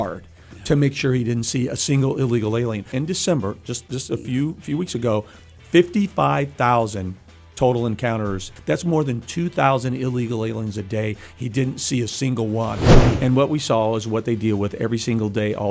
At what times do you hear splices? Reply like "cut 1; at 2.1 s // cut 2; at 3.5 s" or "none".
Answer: cut 1; at 2.9 s // cut 2; at 8.5 s // cut 3; at 12.8 s

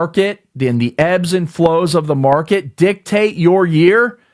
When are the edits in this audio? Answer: none

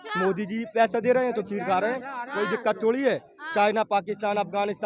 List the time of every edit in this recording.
none

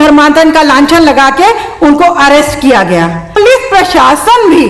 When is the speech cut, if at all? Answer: cut 1; at 3.4 s

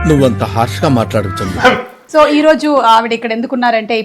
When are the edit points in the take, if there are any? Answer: cut 1; at 1.9 s

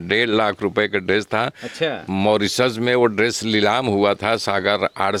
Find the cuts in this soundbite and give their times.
none

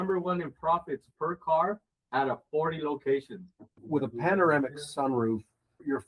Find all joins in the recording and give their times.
cut 1; at 3.7 s

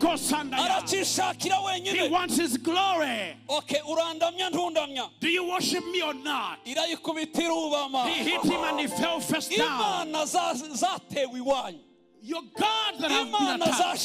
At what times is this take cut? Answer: none

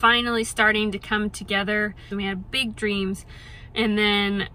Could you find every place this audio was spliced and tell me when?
cut 1; at 2.1 s

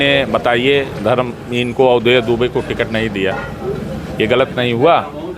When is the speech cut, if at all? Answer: none

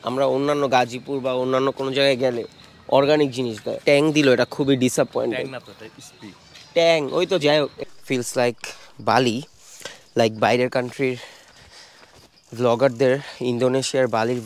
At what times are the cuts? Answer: cut 1; at 3.8 s // cut 2; at 7.8 s

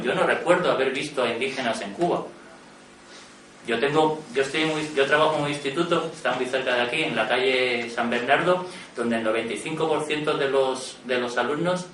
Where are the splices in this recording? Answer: cut 1; at 7.4 s

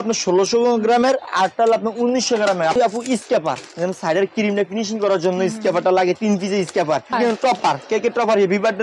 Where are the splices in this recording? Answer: cut 1; at 2.8 s // cut 2; at 7.1 s

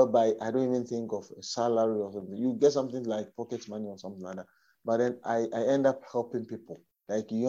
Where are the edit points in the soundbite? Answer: none

